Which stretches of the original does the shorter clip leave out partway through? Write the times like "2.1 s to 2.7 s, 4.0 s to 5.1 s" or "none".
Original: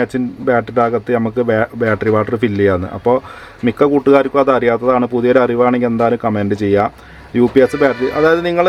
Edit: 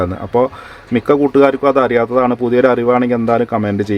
none